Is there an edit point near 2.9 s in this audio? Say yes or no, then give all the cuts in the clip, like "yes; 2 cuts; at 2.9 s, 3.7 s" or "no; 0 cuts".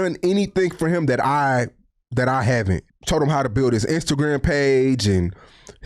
yes; 1 cut; at 2.9 s